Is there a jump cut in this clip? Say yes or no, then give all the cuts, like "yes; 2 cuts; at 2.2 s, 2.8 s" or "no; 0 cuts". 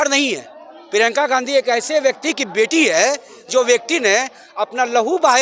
no; 0 cuts